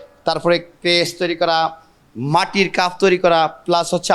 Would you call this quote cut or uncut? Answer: uncut